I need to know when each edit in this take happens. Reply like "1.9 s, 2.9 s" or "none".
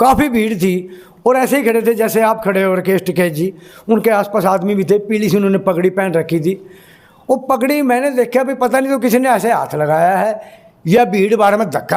none

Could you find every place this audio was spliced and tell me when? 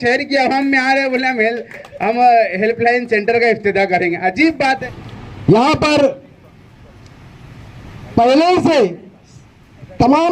4.8 s

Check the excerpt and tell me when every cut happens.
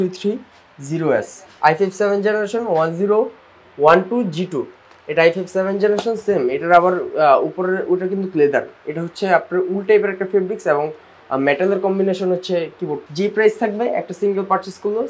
1.4 s, 13.0 s

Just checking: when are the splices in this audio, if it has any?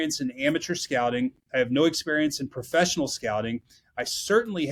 none

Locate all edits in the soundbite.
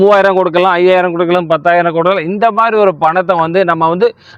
none

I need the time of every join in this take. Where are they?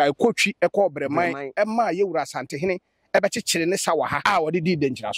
4.2 s

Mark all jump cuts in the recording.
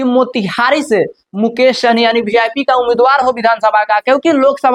none

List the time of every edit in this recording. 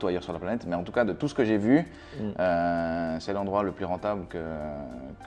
none

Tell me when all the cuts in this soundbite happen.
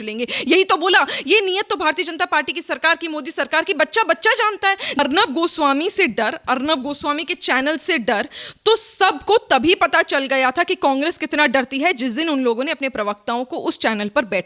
5.0 s

